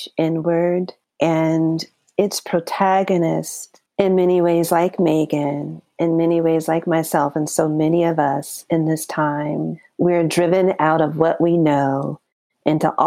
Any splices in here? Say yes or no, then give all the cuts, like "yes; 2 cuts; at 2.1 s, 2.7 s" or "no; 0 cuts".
yes; 1 cut; at 9.8 s